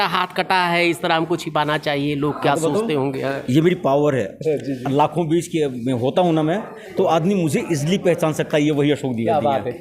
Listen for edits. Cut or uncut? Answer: uncut